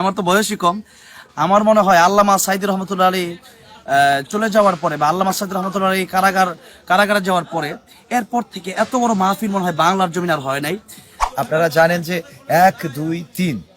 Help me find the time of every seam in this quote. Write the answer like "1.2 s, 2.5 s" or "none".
11.2 s

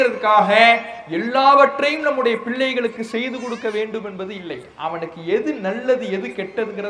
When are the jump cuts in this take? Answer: none

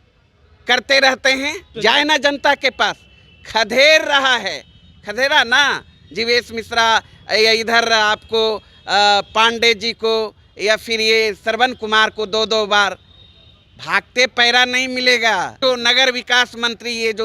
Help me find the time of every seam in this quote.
1.6 s, 15.6 s

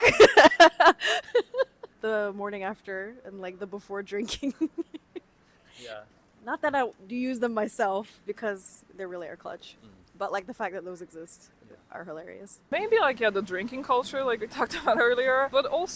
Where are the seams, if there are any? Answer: none

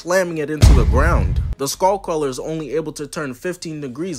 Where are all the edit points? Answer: none

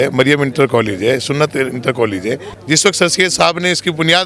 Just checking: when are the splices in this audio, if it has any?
2.5 s

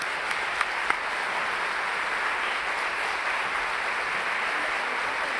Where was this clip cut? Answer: 3.7 s

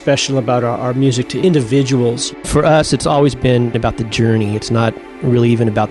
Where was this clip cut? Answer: 1.3 s, 2.4 s, 3.8 s

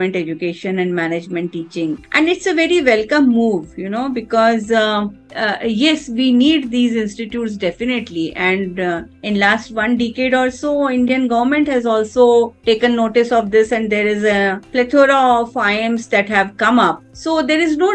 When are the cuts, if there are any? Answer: none

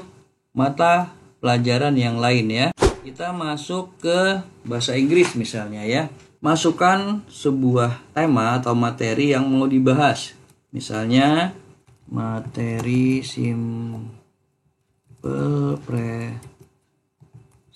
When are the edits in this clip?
2.8 s

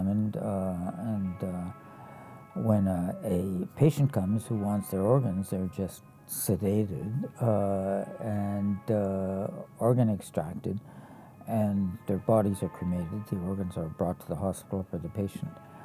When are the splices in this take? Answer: none

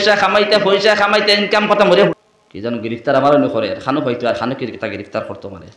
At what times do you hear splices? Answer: 2.1 s

